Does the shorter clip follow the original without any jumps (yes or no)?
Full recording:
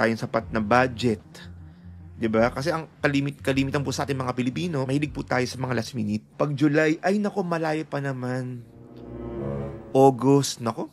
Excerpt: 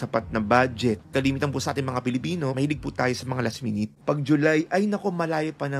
no